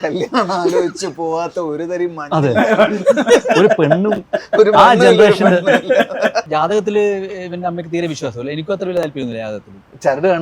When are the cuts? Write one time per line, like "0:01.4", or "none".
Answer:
0:06.5